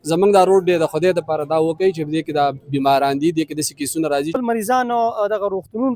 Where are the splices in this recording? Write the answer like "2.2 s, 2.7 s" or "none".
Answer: 4.4 s